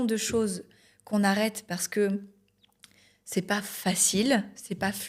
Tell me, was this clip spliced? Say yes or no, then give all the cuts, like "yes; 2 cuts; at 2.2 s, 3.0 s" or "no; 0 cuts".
no; 0 cuts